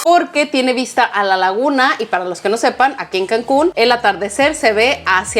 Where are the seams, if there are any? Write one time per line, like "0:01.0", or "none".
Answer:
none